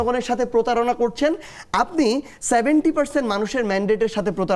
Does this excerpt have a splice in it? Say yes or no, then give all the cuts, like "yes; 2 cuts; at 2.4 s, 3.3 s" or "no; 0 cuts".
no; 0 cuts